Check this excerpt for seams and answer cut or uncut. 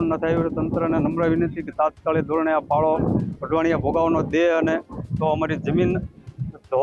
uncut